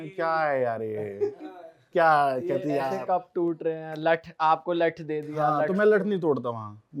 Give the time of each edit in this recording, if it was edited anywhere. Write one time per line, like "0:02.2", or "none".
none